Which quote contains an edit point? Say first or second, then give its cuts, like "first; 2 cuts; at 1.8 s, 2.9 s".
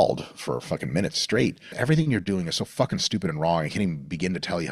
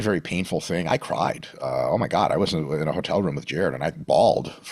first; 1 cut; at 1.7 s